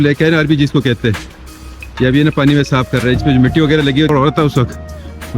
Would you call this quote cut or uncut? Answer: cut